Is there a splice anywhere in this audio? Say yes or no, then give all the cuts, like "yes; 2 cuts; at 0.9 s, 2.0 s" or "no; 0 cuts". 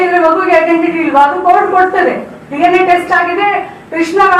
no; 0 cuts